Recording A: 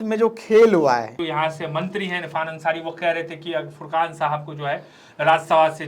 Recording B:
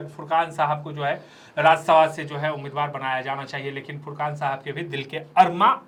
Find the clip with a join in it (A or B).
A